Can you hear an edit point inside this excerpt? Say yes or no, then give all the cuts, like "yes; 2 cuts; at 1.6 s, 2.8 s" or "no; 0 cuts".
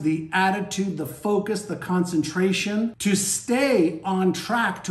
yes; 1 cut; at 3.0 s